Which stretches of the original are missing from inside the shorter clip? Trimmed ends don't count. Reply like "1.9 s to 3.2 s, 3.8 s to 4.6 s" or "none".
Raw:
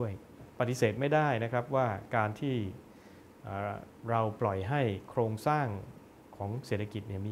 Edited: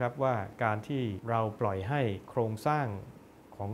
2.7 s to 4.0 s